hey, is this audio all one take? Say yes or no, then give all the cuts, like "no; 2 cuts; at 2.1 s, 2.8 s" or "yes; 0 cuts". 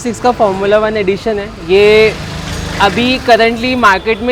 yes; 0 cuts